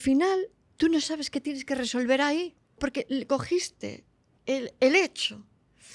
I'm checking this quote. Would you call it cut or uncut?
cut